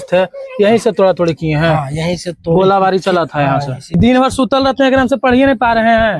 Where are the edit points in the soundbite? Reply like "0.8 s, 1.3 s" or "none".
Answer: 4.0 s